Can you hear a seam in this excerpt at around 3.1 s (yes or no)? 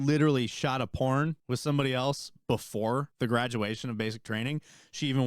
yes